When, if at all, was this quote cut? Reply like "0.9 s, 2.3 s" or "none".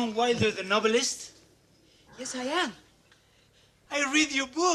none